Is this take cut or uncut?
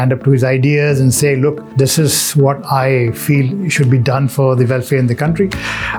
uncut